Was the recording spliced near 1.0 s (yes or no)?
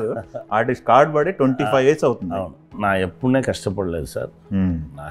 no